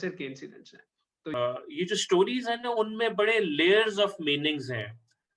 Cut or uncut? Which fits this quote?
cut